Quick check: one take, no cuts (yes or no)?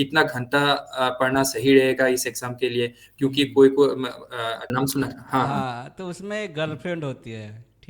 no